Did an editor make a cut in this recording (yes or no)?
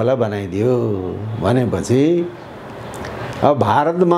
no